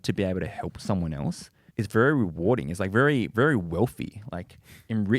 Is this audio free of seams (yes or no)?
no